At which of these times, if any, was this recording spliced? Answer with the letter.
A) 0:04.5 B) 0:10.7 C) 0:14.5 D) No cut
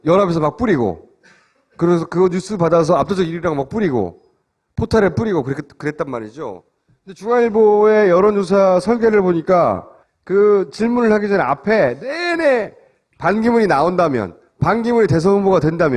B